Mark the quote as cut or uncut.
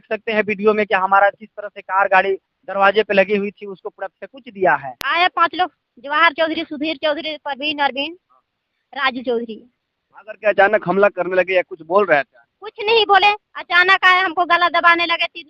cut